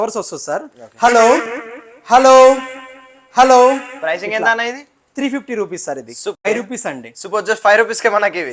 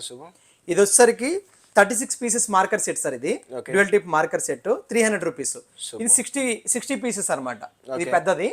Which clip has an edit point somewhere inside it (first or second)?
first